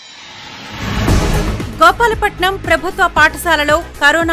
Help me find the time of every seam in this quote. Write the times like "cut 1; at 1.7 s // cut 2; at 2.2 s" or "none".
cut 1; at 1.4 s